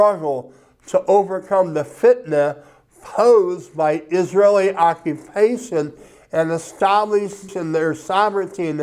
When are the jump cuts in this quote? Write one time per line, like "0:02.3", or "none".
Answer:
0:07.5

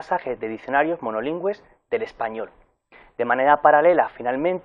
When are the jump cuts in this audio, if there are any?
none

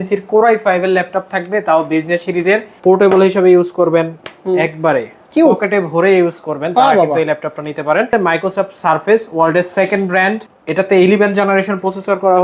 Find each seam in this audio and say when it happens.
0:02.7
0:08.1

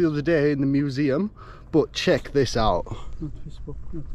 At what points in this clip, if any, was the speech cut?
none

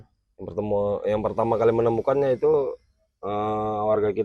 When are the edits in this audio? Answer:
none

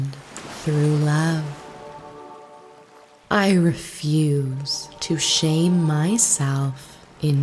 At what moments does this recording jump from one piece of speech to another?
0:01.5
0:03.2

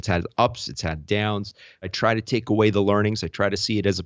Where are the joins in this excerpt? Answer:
0:01.9

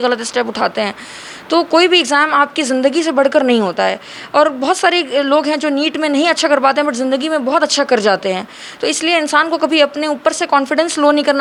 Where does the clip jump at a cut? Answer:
none

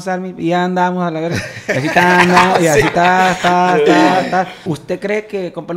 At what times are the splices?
0:04.7

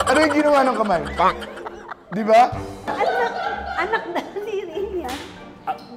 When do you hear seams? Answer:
0:02.7

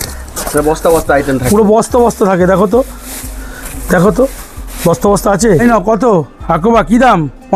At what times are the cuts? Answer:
0:05.6

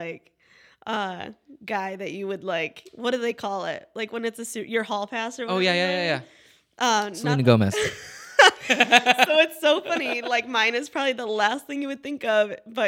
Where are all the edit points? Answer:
none

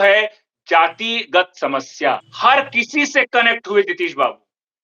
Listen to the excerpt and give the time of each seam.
0:02.3

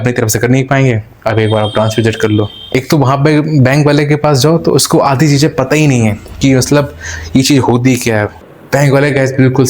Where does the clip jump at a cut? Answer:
0:02.6
0:08.4

